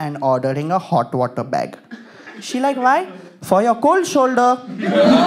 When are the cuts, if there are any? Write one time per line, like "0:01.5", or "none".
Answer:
none